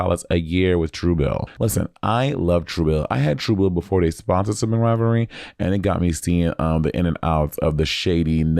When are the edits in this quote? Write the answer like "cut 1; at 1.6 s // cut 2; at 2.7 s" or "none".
cut 1; at 1.5 s